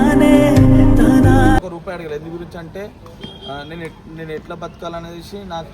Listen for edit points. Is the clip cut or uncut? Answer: cut